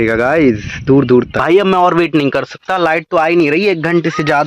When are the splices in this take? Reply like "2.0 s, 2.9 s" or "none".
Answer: 1.4 s